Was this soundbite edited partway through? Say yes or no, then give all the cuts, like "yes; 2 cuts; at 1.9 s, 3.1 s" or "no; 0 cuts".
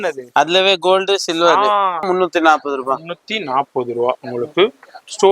yes; 1 cut; at 2.1 s